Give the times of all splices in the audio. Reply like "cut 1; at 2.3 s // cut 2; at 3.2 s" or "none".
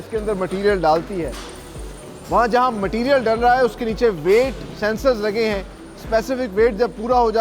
none